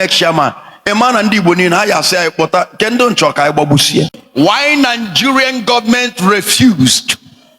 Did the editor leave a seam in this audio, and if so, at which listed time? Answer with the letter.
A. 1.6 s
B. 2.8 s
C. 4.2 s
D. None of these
C